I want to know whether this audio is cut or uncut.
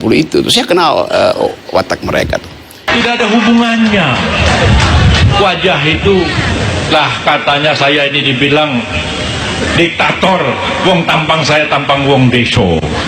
cut